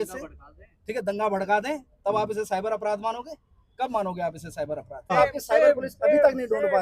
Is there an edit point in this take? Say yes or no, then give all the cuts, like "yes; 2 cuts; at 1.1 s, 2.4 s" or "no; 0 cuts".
yes; 1 cut; at 5.1 s